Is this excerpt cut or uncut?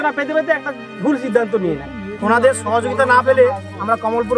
cut